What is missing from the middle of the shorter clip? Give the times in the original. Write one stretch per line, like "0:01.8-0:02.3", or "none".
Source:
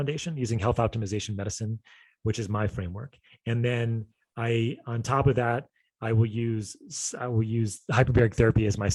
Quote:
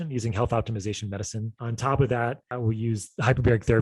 0:01.9-0:04.9
0:05.7-0:07.2